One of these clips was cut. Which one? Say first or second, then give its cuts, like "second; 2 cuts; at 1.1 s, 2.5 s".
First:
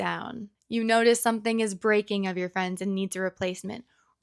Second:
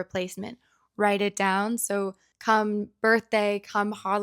second; 1 cut; at 2.2 s